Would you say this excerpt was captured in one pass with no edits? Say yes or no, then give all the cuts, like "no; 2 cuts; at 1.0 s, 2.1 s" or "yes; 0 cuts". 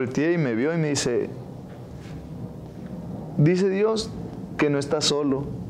yes; 0 cuts